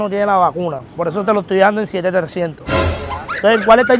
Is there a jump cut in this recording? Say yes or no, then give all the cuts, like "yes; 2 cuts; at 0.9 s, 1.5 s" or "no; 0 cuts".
no; 0 cuts